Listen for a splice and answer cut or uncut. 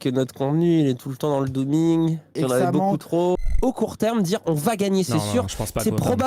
cut